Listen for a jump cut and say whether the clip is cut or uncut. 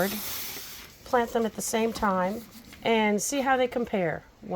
cut